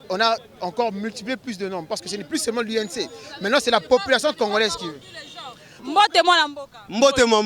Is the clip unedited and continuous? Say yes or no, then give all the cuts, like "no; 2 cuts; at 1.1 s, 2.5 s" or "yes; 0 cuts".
no; 1 cut; at 5.7 s